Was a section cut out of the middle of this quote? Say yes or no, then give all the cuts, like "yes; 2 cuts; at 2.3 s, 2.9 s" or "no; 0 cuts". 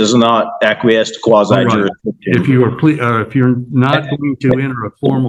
no; 0 cuts